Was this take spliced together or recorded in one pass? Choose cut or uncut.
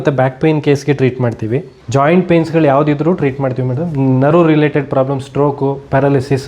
cut